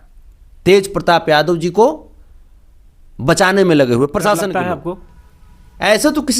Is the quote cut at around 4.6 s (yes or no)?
yes